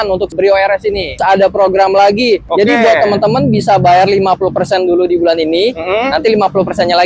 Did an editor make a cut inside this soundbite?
yes; 2 cuts; at 1.2 s, 2.5 s

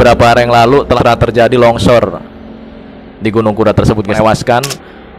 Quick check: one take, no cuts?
no; 2 cuts; at 1.0 s, 4.2 s

